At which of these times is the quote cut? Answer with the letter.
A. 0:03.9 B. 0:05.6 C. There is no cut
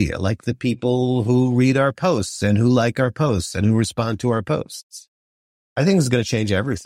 B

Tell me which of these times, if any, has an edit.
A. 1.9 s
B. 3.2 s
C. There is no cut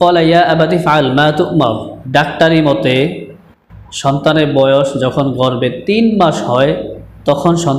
A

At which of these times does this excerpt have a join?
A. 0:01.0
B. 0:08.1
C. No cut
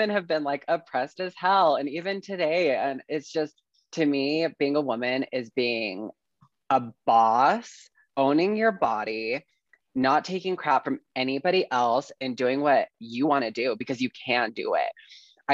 C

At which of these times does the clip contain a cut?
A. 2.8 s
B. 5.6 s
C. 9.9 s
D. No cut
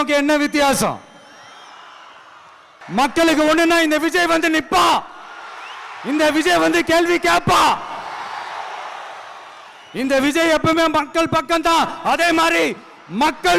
A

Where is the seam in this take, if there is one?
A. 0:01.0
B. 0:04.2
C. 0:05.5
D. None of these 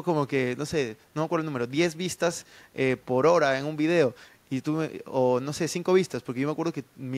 D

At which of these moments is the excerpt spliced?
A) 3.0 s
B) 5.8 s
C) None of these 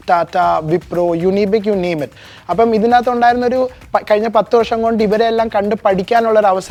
C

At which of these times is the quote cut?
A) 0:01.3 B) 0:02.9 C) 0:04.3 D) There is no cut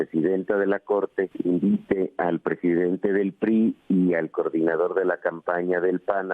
A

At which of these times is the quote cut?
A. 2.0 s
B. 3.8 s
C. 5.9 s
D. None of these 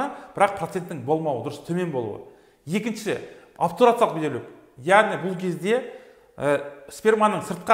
D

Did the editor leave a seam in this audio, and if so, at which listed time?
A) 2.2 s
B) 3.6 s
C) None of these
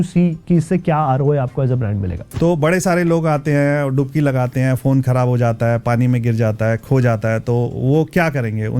A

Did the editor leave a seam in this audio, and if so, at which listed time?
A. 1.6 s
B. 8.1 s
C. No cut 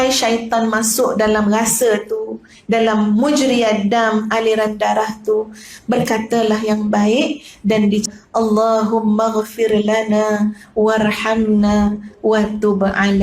B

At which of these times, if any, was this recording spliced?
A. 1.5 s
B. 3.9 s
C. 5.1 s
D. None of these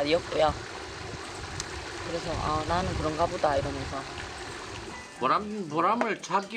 C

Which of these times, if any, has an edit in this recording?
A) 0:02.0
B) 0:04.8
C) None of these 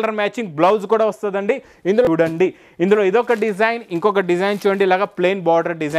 A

